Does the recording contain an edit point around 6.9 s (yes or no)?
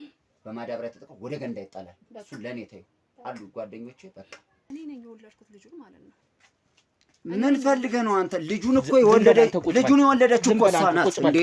no